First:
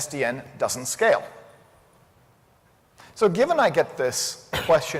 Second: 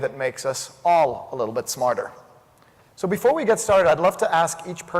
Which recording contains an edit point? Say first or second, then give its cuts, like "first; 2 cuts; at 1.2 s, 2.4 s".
second; 1 cut; at 2.5 s